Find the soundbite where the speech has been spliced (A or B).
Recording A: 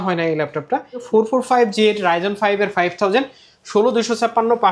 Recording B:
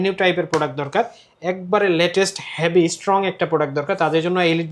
A